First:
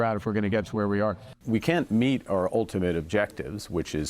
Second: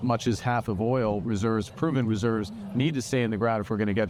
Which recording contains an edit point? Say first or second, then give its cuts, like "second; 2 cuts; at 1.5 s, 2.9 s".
first; 1 cut; at 1.9 s